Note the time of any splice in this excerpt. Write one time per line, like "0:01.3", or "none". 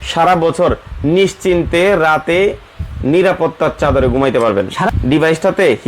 0:04.9